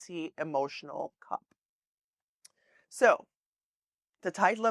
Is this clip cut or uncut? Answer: uncut